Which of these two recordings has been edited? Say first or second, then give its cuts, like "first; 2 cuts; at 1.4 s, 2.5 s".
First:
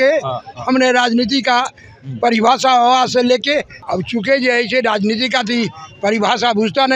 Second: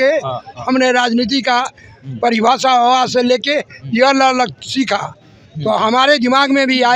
first; 1 cut; at 3.7 s